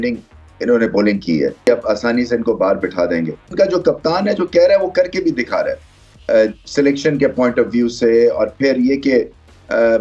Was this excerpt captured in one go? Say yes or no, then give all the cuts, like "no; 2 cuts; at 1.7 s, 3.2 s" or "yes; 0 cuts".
no; 2 cuts; at 1.7 s, 3.5 s